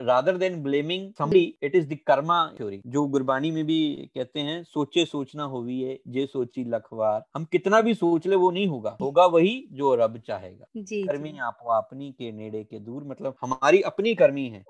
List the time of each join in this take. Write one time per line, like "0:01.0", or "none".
0:01.3
0:08.9